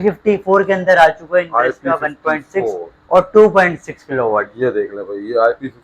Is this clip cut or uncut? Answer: uncut